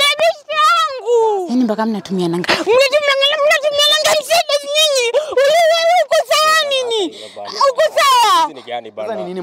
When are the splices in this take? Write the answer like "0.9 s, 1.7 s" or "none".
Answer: 1.5 s